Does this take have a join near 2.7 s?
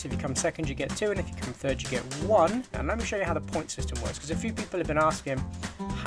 yes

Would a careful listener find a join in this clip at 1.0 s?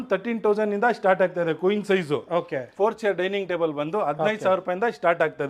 no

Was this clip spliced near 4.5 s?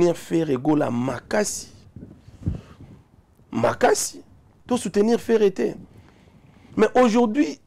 yes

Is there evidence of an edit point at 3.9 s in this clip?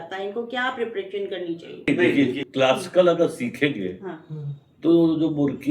no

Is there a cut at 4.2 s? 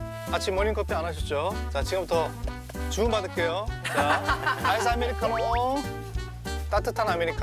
no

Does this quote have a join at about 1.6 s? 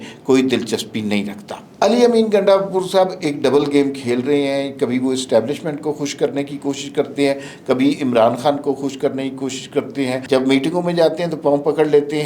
yes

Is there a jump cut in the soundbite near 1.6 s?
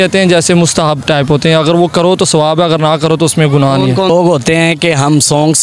no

